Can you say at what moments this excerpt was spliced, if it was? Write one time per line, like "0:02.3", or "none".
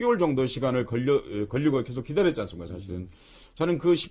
none

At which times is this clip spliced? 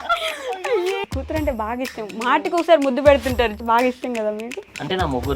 0:01.0
0:03.6

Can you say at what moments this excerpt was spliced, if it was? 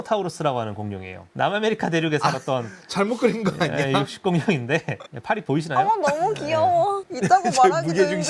none

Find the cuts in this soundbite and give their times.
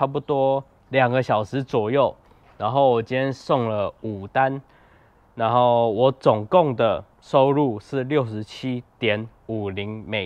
none

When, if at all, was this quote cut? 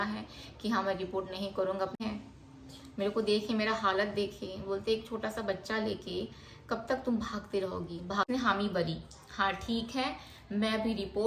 0:02.0
0:08.3

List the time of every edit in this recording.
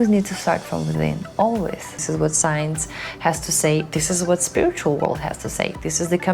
0:01.9

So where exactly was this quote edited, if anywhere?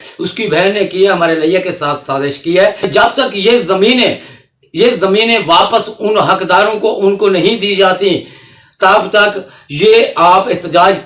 0:02.9

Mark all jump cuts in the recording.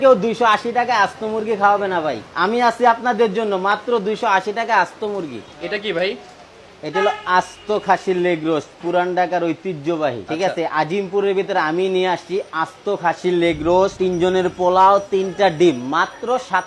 none

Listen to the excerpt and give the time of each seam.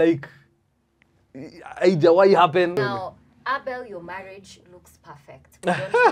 0:02.7

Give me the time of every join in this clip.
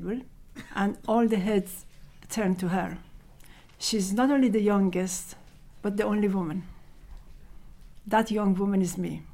none

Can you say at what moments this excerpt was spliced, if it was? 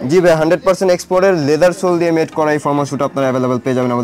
none

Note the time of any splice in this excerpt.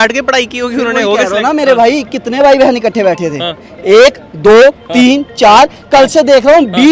none

